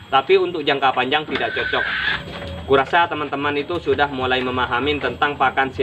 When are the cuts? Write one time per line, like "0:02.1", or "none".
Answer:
0:02.1